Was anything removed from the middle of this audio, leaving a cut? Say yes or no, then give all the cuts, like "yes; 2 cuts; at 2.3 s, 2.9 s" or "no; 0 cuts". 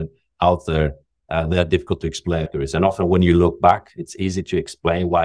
yes; 1 cut; at 2.5 s